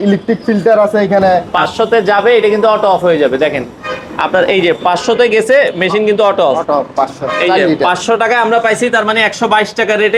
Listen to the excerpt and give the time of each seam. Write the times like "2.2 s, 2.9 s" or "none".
1.5 s